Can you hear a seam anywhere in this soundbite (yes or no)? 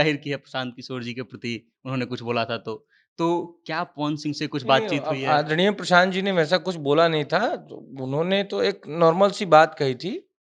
no